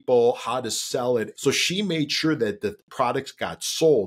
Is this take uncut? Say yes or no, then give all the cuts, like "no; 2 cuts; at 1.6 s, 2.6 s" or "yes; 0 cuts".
no; 1 cut; at 1.3 s